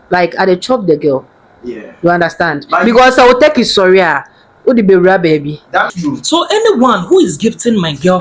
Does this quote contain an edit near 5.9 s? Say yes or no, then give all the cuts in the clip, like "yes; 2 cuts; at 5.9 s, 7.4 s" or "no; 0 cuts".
yes; 1 cut; at 5.9 s